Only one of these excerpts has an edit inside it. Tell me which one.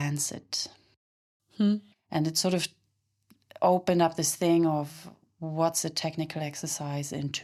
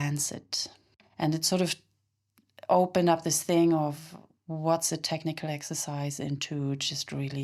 second; 1 cut; at 1.0 s

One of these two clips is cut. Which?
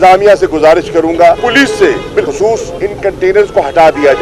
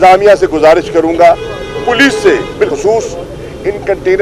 first; 2 cuts; at 1.4 s, 2.7 s

